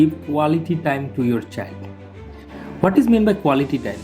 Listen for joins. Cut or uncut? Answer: uncut